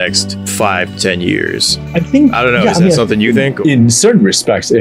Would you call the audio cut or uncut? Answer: uncut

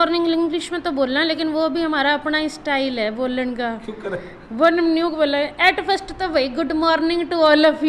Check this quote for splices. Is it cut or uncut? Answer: uncut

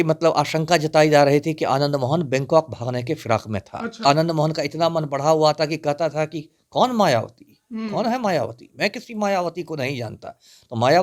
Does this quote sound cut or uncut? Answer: cut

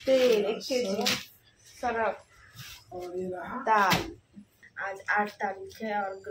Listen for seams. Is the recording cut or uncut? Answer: cut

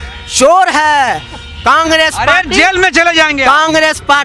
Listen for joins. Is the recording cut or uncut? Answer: uncut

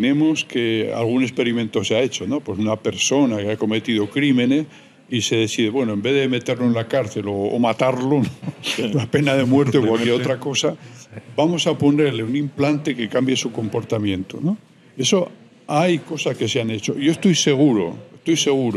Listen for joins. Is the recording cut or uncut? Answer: uncut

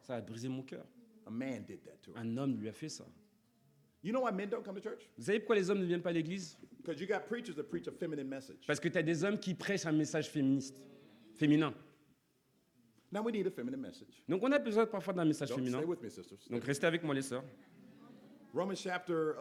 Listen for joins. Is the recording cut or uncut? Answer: uncut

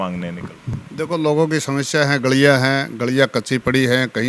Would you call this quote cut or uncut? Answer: uncut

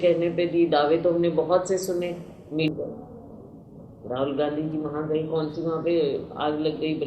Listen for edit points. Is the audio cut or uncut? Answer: cut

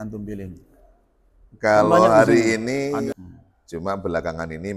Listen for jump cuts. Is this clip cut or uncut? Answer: cut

